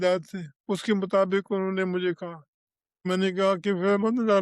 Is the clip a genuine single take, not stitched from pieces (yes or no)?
no